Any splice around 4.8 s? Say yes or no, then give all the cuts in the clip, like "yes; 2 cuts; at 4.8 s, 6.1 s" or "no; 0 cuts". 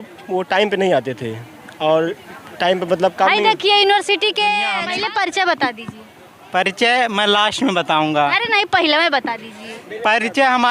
yes; 1 cut; at 4.8 s